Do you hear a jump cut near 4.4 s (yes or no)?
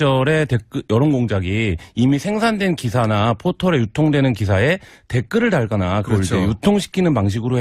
yes